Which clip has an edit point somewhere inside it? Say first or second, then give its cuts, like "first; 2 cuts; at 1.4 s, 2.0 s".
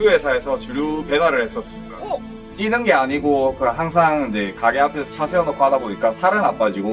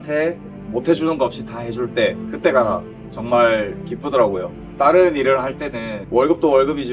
first; 1 cut; at 2.4 s